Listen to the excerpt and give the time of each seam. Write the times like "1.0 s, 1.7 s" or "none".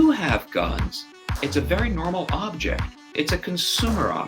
3.1 s